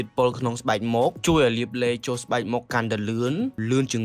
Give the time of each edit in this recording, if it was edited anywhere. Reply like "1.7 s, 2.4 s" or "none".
none